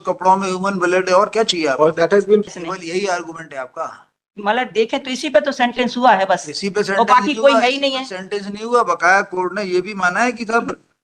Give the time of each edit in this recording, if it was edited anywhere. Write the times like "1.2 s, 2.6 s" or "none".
2.6 s